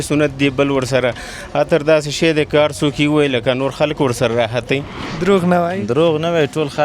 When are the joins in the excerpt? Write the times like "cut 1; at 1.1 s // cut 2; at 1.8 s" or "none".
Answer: cut 1; at 5.0 s